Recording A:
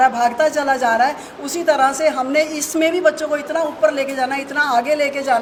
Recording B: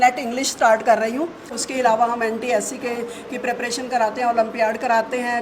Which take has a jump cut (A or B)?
B